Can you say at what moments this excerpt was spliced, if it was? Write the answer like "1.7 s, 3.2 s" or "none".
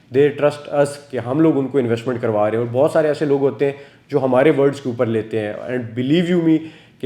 none